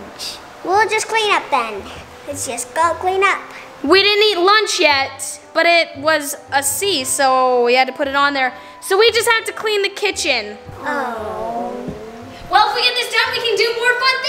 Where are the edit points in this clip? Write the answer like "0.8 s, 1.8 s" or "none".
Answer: none

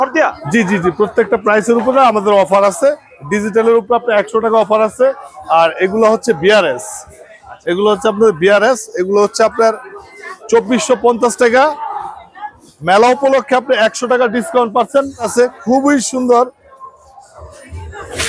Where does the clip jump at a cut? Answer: 15.3 s

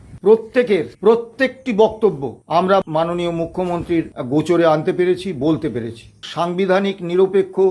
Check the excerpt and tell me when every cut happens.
0.9 s, 2.8 s, 4.2 s, 6.2 s

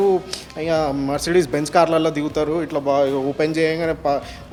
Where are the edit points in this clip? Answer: none

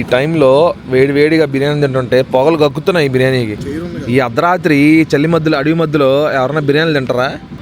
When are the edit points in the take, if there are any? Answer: 3.6 s

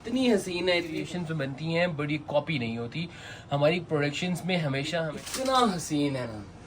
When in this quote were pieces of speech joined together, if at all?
1.0 s, 5.2 s

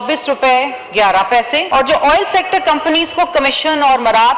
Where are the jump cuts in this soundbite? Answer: 1.6 s

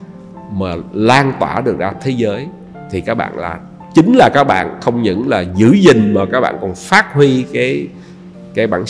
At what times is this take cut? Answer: none

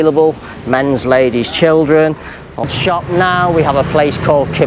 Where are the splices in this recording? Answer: 2.6 s

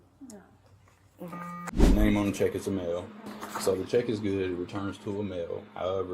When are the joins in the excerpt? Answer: 1.7 s

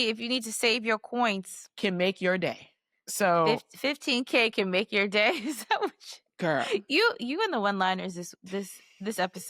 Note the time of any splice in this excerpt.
none

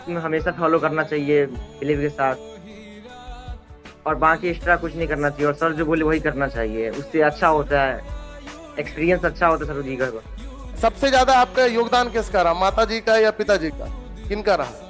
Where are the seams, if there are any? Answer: 10.7 s

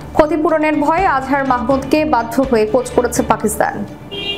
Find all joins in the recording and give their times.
none

